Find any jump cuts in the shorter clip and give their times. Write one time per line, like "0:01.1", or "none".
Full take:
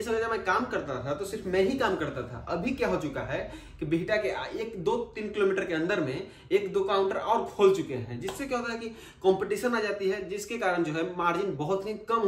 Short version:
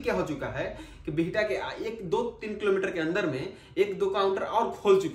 none